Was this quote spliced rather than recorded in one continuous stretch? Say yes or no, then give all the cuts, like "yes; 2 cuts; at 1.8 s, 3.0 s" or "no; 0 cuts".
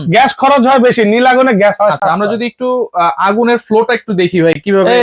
no; 0 cuts